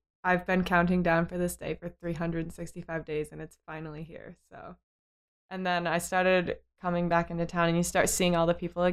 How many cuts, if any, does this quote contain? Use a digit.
1